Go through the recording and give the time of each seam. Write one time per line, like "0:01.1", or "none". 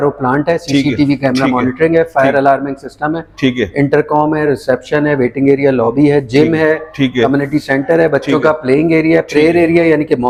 none